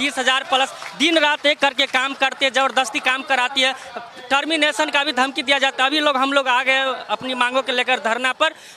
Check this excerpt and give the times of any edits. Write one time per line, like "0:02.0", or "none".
none